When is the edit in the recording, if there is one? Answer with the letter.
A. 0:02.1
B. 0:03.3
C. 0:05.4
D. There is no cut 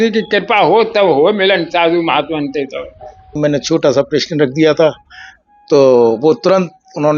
B